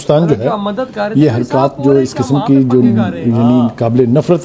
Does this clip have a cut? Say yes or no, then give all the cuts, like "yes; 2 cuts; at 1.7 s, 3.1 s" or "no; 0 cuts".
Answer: no; 0 cuts